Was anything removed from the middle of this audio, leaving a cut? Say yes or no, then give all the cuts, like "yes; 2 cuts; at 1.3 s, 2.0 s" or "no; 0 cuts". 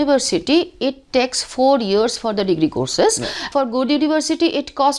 yes; 1 cut; at 3.5 s